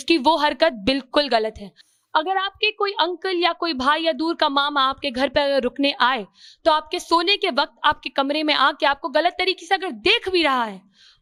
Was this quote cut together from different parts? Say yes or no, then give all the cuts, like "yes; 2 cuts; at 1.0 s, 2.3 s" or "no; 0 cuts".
no; 0 cuts